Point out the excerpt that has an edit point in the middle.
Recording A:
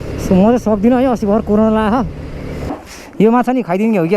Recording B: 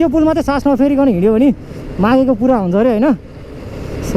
A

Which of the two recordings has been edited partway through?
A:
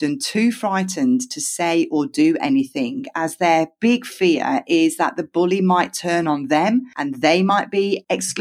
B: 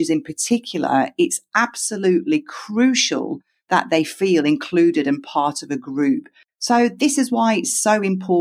B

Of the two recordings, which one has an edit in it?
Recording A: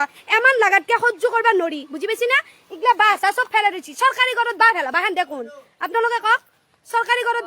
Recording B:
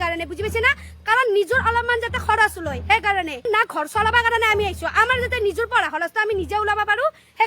B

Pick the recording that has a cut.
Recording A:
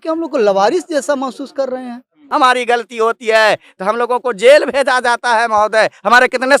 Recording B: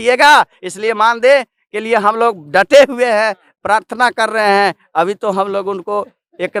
A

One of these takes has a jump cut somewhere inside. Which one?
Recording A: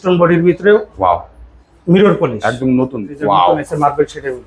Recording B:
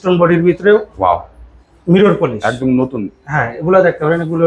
A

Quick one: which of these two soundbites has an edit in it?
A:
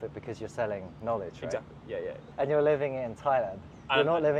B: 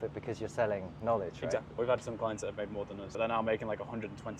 B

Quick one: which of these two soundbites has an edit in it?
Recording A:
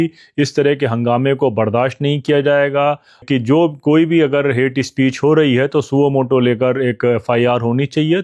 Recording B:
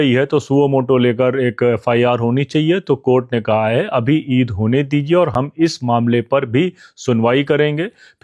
A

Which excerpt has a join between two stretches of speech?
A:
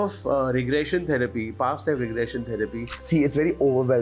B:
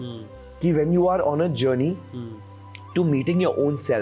A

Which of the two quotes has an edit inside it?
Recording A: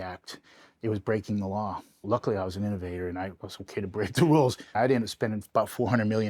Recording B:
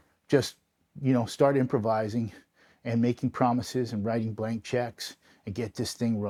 A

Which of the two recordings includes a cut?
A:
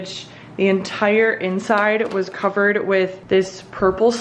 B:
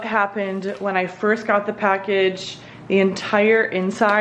A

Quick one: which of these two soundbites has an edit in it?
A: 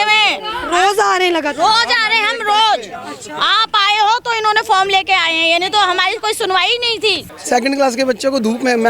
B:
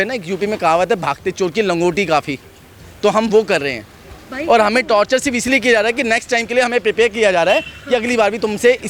A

